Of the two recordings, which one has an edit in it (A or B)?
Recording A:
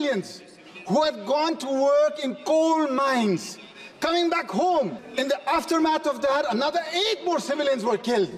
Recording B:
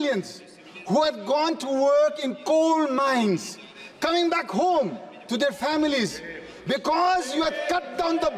A